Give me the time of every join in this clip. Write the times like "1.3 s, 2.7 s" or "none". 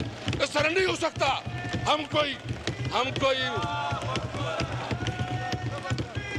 none